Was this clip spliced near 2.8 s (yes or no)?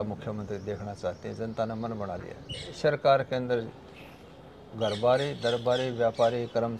yes